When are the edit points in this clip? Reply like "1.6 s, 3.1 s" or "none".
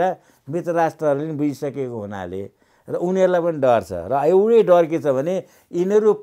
none